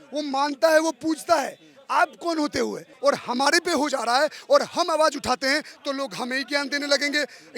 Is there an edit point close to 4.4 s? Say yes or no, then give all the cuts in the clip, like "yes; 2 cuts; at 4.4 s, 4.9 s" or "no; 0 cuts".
no; 1 cut; at 2.8 s